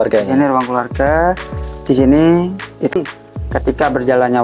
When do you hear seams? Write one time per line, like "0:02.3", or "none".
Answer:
0:03.0